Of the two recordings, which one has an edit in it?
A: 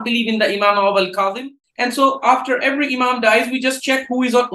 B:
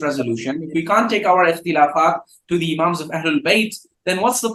A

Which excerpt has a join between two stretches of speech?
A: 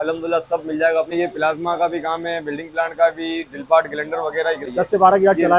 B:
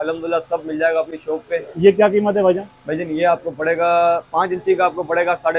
A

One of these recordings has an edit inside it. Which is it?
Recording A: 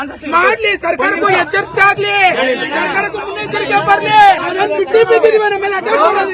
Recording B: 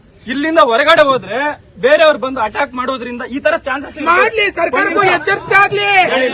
A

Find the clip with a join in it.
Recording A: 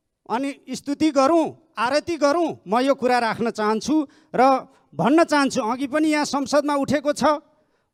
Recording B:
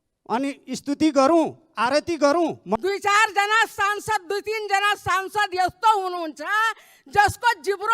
B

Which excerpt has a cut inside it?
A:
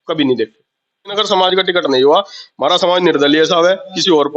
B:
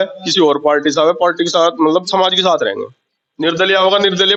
A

